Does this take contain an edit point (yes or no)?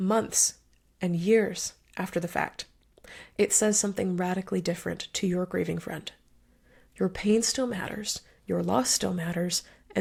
no